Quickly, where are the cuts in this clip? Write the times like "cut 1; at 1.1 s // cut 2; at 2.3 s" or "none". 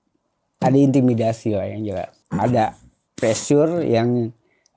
cut 1; at 2.1 s